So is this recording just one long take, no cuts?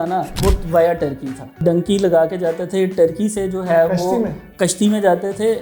no; 1 cut; at 1.6 s

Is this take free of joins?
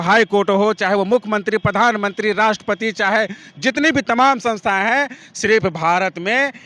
yes; 0 cuts

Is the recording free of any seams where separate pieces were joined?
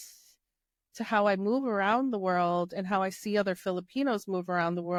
yes; 0 cuts

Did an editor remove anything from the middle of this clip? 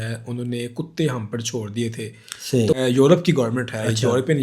yes; 1 cut; at 2.7 s

